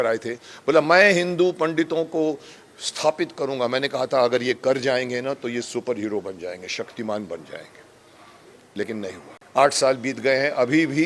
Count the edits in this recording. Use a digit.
1